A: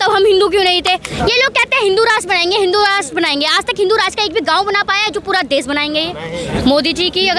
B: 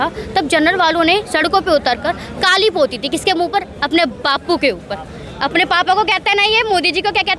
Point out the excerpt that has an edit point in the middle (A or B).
A